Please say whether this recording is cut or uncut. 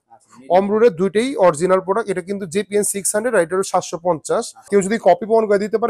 cut